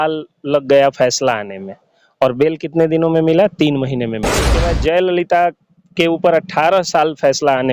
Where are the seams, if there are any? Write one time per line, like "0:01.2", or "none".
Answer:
0:04.6